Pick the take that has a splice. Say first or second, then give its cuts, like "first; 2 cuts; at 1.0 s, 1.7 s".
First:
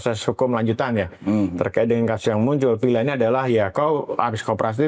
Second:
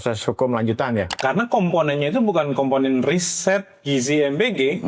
second; 1 cut; at 1.1 s